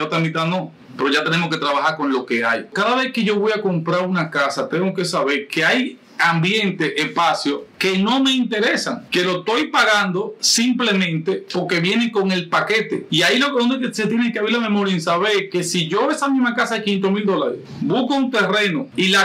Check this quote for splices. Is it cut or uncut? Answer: cut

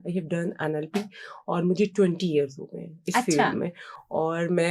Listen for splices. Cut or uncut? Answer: uncut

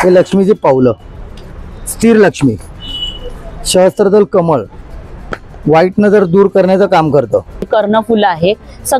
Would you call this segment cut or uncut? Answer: cut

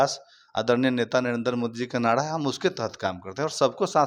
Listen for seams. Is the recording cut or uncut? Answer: uncut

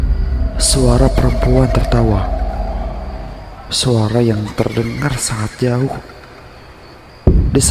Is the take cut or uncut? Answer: uncut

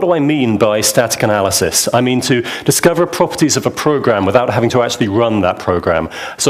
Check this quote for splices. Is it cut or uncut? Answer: uncut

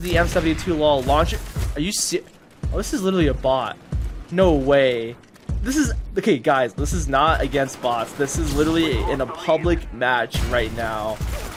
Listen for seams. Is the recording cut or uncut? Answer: uncut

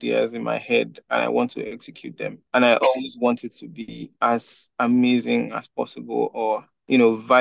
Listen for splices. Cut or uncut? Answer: cut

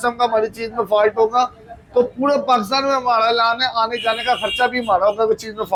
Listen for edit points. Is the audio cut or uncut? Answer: uncut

